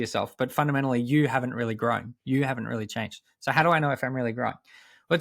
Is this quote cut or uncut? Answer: uncut